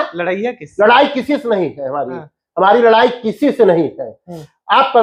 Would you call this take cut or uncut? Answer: uncut